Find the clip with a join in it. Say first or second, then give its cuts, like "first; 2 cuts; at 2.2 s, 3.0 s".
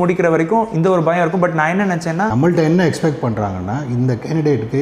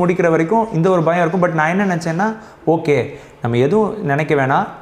first; 1 cut; at 2.3 s